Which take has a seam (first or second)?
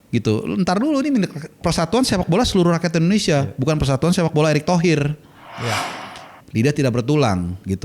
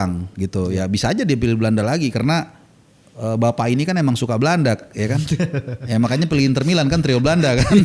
first